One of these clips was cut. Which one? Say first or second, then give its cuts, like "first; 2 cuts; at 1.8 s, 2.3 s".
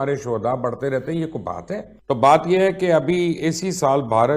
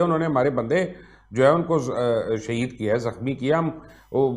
first; 1 cut; at 1.9 s